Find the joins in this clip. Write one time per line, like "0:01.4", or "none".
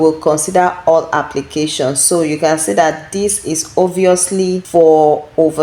0:04.6